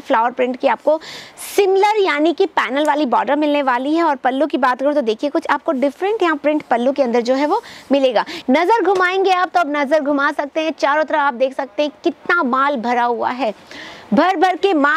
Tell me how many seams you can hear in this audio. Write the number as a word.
one